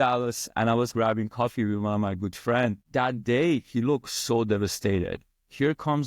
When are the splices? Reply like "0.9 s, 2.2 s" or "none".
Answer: 0.9 s